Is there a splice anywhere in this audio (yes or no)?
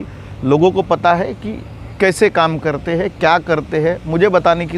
no